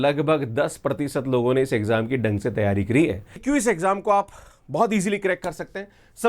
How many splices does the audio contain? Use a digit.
1